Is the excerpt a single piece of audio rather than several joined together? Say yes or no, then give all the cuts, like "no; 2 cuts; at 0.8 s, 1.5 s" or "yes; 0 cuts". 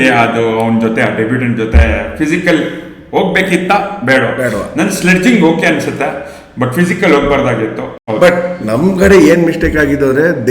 no; 1 cut; at 8.0 s